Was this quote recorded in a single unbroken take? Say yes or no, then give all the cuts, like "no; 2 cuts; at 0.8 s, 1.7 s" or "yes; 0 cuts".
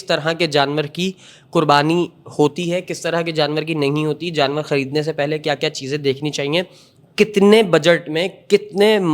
yes; 0 cuts